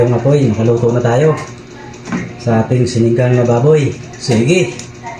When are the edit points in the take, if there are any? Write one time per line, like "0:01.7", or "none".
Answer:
0:04.1